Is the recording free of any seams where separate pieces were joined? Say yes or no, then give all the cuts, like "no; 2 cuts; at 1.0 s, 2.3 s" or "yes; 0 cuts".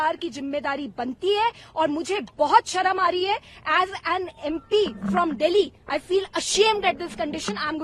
yes; 0 cuts